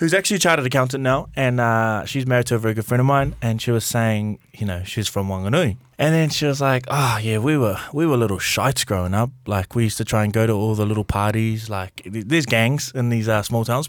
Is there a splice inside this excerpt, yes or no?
yes